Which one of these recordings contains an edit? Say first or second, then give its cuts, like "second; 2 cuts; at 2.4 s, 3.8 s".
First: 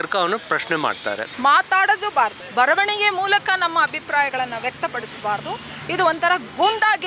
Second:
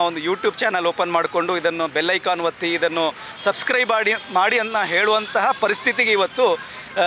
first; 2 cuts; at 1.3 s, 2.4 s